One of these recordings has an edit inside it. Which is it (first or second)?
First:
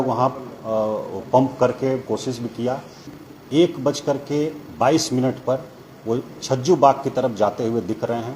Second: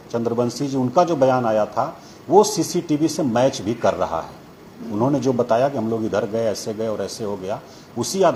first